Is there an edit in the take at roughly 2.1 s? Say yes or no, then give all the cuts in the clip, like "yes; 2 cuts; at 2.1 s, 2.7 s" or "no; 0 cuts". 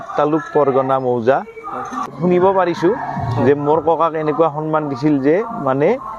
yes; 1 cut; at 2.1 s